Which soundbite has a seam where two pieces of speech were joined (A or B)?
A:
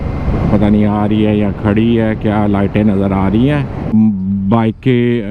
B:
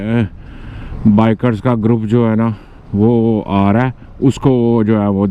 A